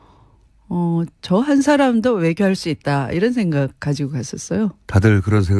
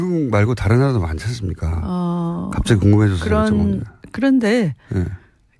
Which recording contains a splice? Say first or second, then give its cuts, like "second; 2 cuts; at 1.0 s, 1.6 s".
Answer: second; 1 cut; at 3.8 s